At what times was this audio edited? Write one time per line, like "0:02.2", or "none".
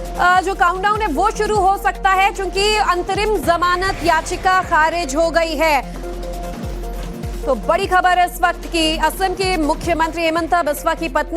0:09.0